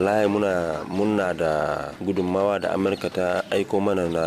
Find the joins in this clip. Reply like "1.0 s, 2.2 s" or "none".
1.9 s